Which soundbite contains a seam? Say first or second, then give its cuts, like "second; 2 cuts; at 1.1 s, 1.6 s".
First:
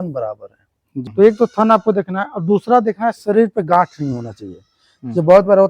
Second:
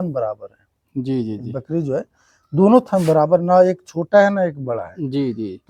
first; 1 cut; at 1.0 s